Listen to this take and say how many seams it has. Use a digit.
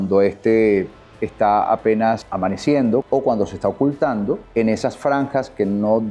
3